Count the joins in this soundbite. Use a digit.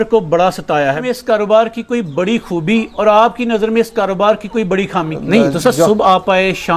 2